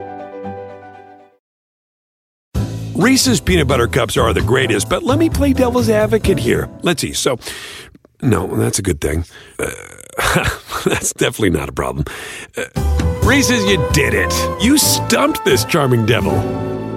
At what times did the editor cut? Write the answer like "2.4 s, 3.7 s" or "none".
none